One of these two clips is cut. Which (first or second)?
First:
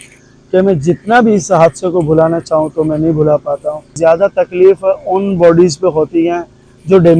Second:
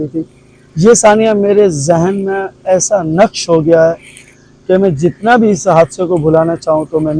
first